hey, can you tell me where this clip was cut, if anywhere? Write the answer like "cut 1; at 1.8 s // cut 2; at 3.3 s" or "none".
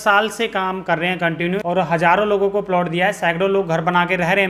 cut 1; at 1.6 s